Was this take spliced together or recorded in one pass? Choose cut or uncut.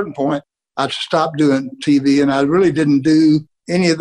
uncut